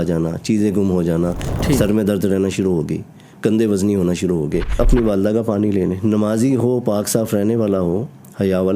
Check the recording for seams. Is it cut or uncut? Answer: cut